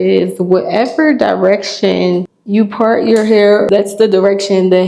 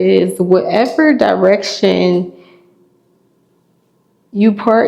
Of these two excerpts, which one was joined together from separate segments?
first; 2 cuts; at 2.4 s, 3.7 s

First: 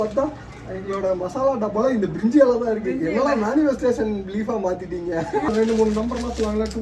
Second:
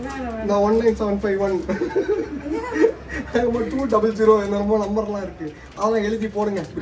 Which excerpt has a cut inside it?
first; 1 cut; at 5.5 s

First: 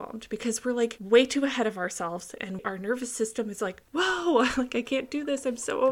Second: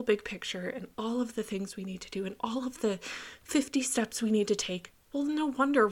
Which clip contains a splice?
first; 2 cuts; at 1.0 s, 2.6 s

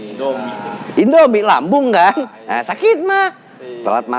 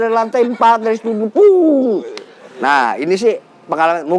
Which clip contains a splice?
second; 1 cut; at 2.4 s

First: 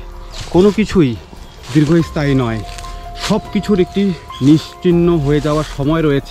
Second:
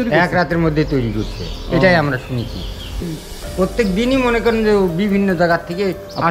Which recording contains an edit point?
second; 1 cut; at 3.0 s

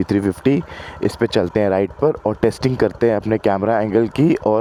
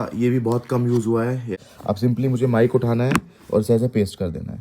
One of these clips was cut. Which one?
second; 1 cut; at 1.6 s

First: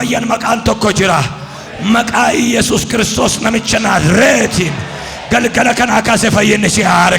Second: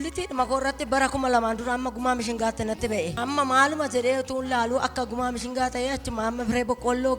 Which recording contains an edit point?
second; 1 cut; at 3.2 s

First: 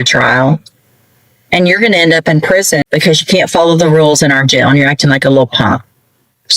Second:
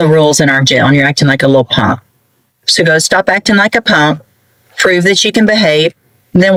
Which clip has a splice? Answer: first; 1 cut; at 2.8 s

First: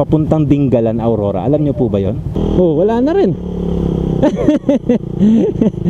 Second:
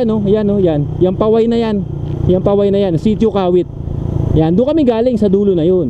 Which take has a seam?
first; 1 cut; at 2.4 s

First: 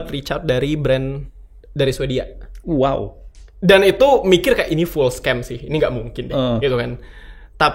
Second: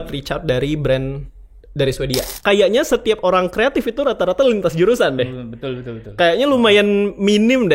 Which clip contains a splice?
second; 1 cut; at 2.3 s

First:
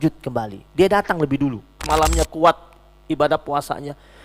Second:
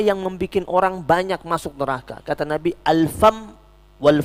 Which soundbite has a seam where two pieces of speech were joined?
first; 1 cut; at 1.8 s

